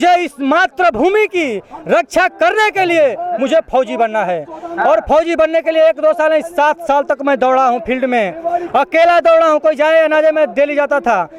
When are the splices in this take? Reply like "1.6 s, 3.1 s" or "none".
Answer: none